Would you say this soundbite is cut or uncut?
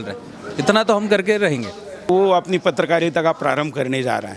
cut